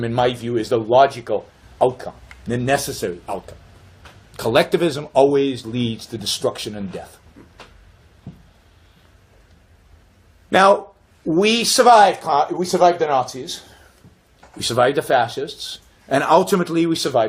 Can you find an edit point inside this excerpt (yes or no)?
no